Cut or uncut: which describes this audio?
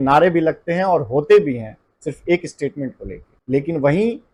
uncut